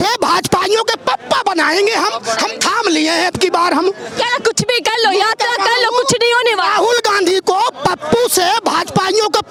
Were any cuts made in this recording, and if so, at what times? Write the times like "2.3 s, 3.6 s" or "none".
none